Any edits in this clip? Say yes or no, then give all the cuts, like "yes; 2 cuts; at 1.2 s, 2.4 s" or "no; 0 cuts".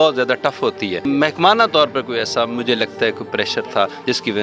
yes; 1 cut; at 1.0 s